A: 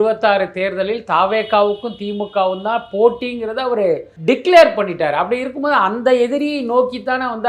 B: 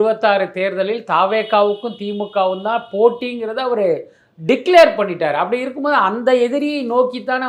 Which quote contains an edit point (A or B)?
A